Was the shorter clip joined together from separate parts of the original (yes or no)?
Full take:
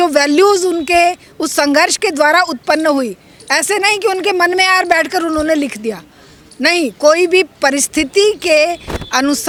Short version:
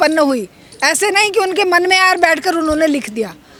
no